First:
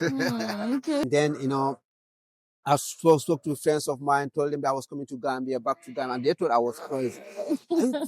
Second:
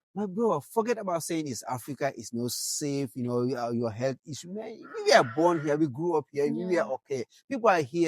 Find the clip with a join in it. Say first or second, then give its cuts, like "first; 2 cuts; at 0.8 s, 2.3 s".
first; 1 cut; at 1.0 s